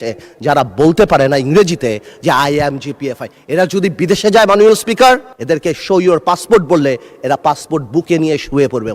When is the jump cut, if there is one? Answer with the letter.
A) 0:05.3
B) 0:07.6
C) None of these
A